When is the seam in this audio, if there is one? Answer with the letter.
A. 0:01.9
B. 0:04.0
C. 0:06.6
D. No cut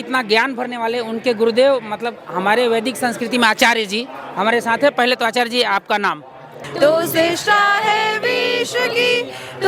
C